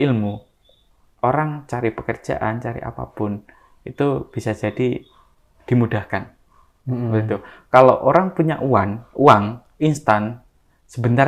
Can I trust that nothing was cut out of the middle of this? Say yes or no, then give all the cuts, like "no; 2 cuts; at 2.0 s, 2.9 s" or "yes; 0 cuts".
yes; 0 cuts